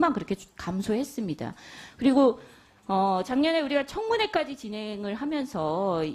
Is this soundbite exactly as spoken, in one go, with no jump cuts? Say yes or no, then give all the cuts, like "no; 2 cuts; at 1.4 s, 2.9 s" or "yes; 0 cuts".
no; 1 cut; at 3.3 s